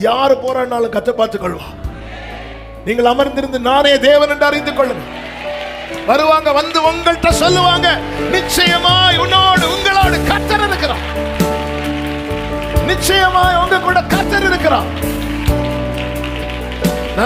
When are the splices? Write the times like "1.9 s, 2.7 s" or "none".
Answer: none